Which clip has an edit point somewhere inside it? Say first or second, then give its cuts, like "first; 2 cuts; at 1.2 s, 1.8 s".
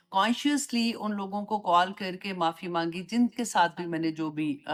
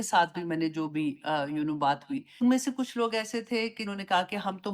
second; 2 cuts; at 2.4 s, 3.8 s